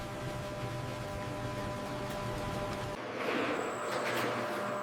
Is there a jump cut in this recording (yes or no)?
yes